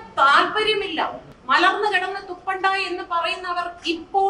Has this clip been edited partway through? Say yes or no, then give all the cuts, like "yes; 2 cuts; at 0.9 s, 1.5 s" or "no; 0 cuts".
yes; 1 cut; at 1.3 s